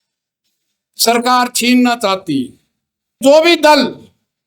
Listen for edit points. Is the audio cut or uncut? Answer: cut